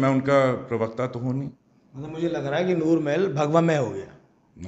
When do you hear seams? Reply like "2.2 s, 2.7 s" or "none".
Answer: 1.6 s